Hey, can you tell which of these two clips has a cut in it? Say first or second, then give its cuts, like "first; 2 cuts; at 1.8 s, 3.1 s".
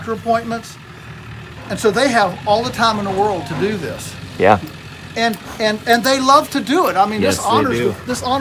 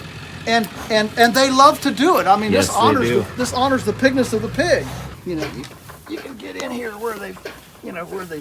second; 1 cut; at 5.0 s